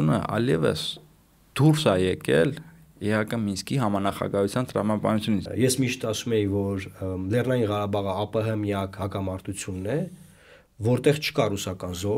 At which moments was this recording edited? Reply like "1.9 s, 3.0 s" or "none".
5.4 s